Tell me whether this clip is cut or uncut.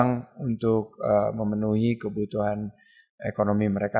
uncut